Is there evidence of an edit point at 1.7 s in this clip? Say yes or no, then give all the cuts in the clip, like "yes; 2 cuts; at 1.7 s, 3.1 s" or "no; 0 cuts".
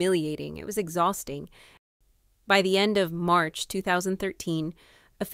yes; 1 cut; at 1.7 s